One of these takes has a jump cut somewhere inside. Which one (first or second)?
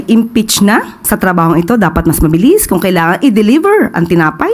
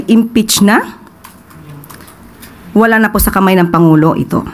first